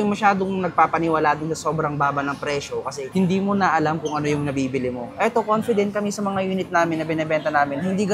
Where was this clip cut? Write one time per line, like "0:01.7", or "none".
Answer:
none